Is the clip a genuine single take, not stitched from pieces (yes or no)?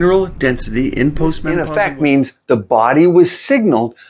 no